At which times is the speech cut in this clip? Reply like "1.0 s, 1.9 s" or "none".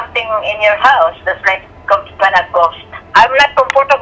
3.0 s